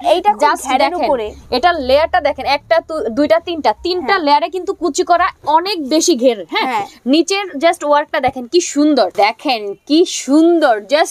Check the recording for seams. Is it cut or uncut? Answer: cut